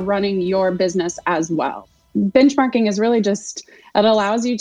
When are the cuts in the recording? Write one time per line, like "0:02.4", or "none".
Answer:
0:02.0